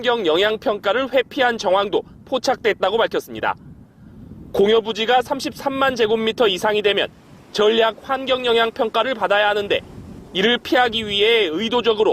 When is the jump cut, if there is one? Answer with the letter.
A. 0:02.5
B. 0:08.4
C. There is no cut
B